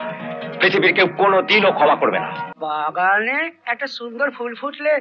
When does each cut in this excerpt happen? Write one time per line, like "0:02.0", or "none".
0:02.5